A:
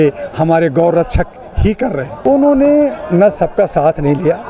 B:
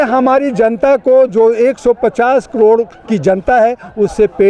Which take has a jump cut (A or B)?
A